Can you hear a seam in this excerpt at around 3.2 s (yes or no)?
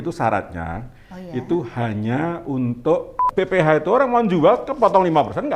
yes